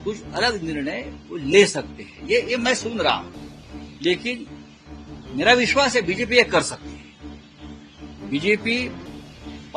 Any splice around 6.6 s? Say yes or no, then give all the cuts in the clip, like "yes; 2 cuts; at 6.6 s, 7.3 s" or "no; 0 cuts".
no; 0 cuts